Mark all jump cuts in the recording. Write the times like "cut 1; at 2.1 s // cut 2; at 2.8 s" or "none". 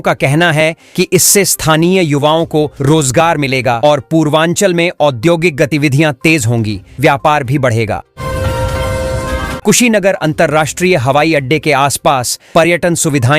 cut 1; at 8.1 s // cut 2; at 9.6 s